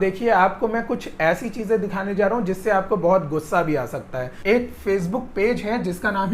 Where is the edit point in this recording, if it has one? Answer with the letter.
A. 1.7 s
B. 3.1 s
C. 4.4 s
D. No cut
C